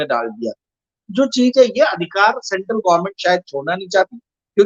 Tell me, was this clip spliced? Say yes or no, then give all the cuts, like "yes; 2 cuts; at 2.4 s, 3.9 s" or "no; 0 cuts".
yes; 1 cut; at 1.0 s